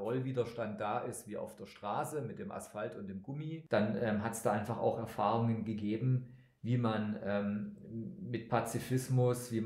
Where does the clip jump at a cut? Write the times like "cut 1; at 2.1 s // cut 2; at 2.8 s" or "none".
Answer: cut 1; at 3.5 s